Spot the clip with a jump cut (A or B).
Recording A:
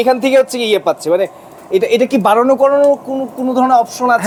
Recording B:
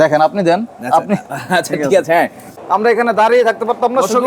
B